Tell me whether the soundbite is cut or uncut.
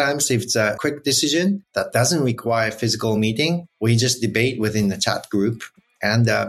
cut